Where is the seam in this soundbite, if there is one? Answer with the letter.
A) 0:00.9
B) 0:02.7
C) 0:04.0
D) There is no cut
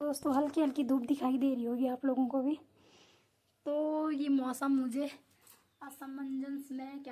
D